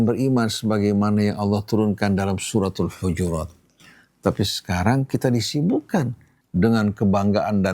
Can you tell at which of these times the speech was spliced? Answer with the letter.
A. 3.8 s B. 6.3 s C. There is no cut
B